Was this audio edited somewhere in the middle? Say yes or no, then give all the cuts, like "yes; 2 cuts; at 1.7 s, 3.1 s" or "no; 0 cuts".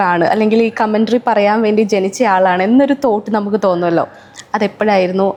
no; 0 cuts